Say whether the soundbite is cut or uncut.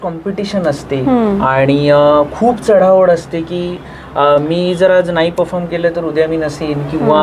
uncut